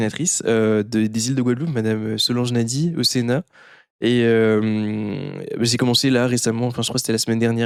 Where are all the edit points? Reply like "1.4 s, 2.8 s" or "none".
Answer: none